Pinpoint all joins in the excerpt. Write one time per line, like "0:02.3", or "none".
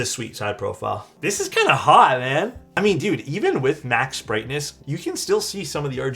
0:01.1
0:02.6
0:04.7